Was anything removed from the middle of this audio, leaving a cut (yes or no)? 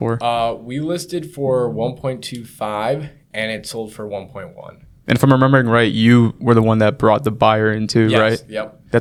no